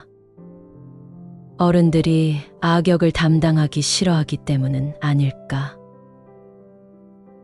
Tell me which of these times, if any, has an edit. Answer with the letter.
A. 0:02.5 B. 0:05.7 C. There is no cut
B